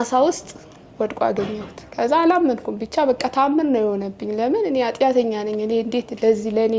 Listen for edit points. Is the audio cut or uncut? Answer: uncut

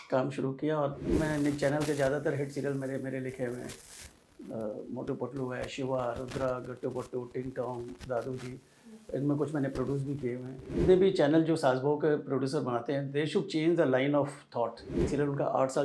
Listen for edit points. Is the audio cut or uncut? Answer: cut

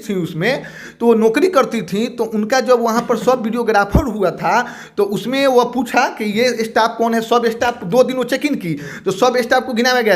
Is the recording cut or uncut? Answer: uncut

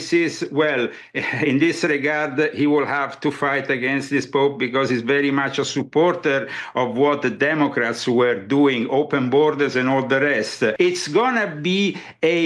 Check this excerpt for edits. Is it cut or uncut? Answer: cut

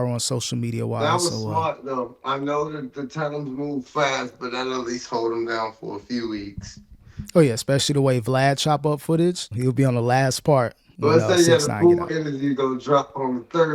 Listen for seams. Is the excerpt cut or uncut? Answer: cut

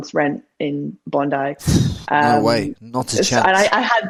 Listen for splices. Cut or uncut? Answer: uncut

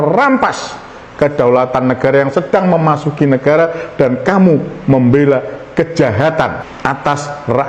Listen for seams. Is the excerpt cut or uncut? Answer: uncut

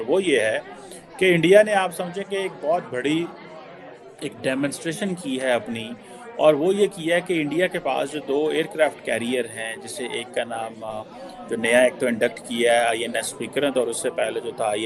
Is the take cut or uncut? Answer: uncut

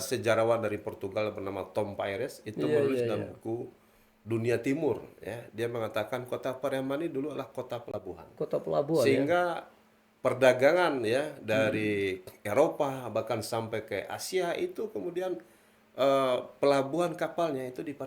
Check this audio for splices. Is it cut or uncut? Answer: uncut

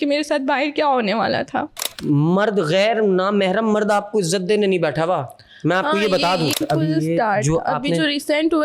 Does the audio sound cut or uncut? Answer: cut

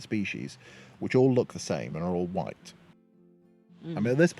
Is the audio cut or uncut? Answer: cut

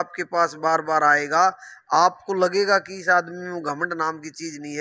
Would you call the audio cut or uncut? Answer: uncut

